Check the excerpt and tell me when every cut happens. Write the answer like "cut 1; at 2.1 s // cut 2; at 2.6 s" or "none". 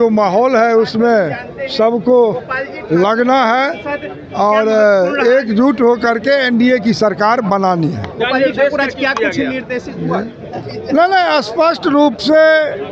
none